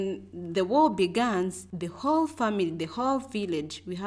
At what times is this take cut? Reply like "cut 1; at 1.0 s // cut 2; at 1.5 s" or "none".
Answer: none